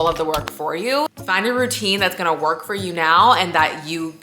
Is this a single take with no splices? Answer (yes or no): no